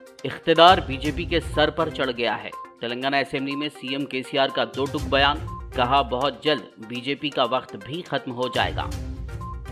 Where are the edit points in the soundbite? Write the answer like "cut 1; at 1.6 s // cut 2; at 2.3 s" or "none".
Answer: none